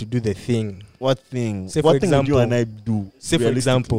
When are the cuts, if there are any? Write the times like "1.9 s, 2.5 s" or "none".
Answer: 0.9 s